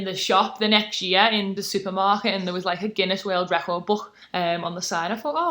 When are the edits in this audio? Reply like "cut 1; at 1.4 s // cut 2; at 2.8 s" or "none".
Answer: cut 1; at 1.6 s // cut 2; at 4.2 s